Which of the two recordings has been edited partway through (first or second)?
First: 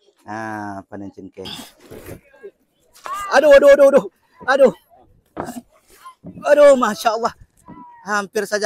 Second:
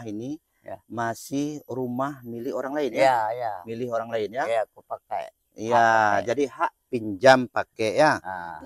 first